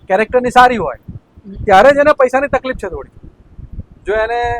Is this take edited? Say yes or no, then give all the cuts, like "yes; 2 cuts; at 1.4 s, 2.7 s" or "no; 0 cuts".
no; 0 cuts